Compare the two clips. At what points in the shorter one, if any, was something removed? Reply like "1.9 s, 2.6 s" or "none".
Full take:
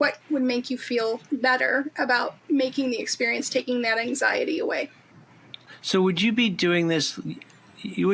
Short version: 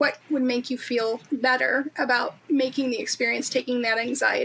none